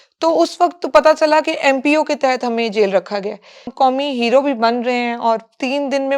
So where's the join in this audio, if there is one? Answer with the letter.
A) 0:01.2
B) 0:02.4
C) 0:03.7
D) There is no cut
C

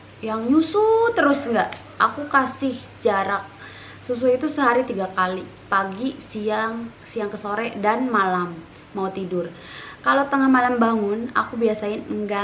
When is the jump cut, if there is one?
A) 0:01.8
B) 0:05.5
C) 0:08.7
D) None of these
D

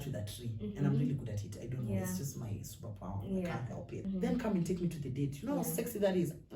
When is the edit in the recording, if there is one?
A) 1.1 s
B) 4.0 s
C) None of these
B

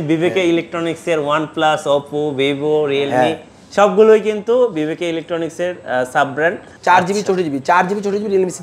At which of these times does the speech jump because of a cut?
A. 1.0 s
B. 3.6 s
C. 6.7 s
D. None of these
C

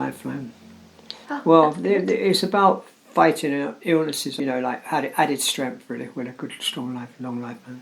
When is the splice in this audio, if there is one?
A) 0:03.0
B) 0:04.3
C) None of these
B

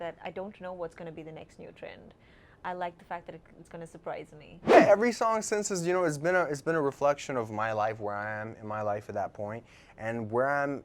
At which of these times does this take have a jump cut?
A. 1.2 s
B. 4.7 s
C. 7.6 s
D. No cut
B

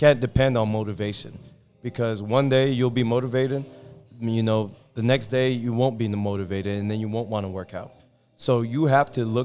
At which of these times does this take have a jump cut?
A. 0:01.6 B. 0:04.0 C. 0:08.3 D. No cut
D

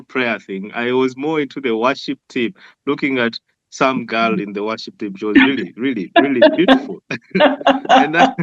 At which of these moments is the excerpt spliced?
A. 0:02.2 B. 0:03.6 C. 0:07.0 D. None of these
D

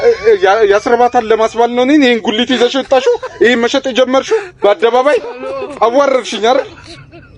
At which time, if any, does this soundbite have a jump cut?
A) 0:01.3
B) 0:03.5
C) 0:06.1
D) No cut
D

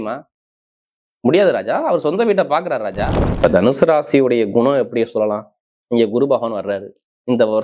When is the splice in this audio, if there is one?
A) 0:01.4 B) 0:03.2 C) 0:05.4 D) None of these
B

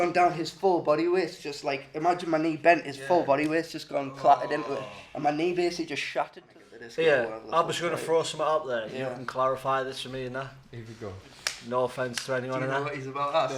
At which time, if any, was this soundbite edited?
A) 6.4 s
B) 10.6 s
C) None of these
A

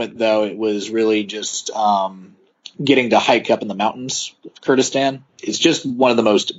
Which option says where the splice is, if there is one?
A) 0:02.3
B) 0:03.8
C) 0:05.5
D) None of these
C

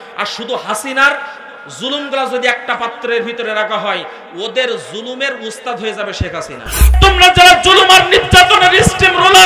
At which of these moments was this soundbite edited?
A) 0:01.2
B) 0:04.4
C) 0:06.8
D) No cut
C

